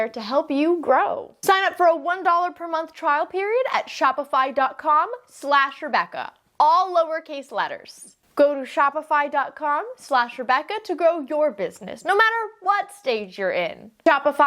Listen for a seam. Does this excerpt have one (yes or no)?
yes